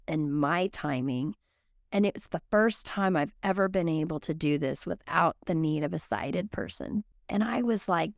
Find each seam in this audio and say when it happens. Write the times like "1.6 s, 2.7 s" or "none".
7.2 s